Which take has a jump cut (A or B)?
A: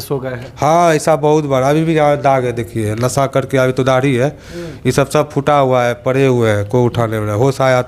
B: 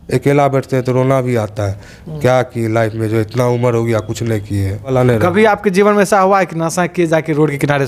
B